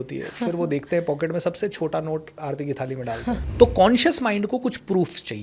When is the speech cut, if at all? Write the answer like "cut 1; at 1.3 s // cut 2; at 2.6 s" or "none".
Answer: cut 1; at 3.4 s